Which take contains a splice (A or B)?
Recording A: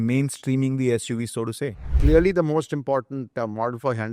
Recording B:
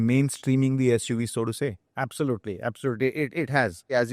A